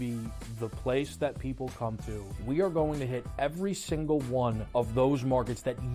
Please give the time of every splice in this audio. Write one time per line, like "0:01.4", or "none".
0:02.3
0:04.6